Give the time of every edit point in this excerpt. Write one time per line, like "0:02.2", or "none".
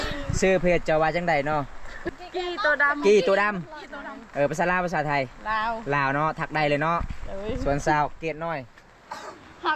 0:02.0